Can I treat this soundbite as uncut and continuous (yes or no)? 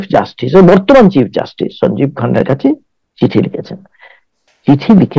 yes